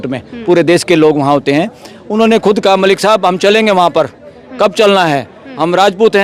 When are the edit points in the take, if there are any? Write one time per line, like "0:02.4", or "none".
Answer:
none